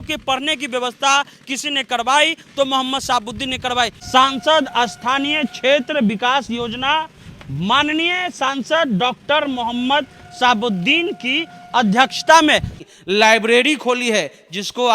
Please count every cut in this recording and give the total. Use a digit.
2